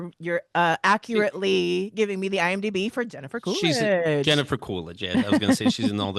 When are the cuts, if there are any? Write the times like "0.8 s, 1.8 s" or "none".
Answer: none